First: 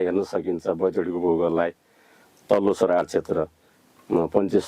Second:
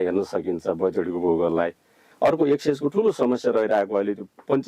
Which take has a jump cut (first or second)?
second